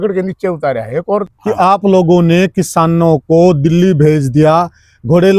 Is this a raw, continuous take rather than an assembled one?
no; 1 cut; at 1.3 s

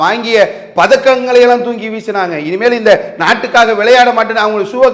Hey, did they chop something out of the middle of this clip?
no; 0 cuts

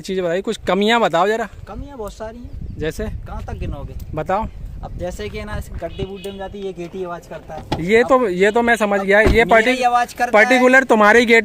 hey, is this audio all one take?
yes; 0 cuts

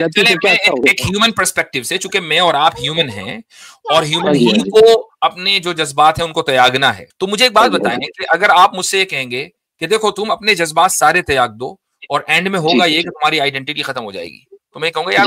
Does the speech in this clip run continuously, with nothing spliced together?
no; 1 cut; at 7.1 s

